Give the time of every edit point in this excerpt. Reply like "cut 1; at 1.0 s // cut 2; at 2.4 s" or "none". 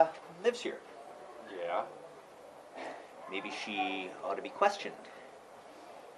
none